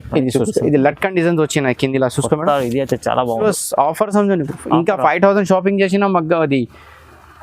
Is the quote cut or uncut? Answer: cut